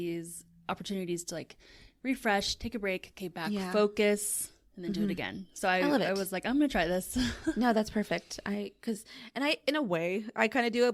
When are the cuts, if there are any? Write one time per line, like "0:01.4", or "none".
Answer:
none